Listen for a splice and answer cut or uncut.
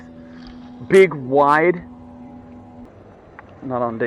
cut